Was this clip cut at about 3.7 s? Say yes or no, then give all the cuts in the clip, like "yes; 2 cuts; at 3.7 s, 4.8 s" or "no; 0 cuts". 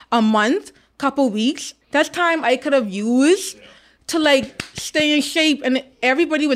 no; 1 cut; at 1.7 s